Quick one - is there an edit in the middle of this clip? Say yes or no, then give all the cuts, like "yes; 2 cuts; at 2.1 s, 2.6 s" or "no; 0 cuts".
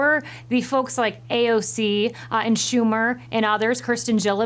no; 0 cuts